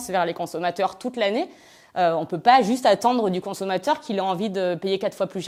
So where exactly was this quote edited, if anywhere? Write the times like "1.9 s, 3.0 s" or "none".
none